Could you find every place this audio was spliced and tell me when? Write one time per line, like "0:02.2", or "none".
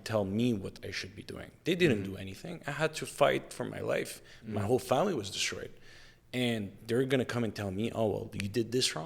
none